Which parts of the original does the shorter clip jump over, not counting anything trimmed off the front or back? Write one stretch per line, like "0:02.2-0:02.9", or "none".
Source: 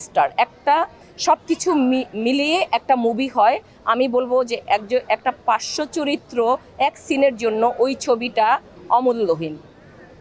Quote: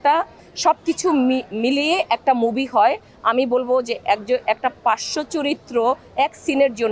none